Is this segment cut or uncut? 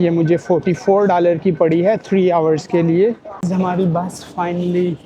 cut